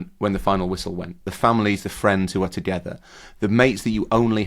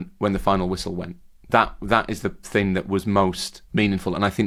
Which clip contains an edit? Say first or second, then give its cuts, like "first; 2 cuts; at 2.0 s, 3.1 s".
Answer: first; 1 cut; at 1.3 s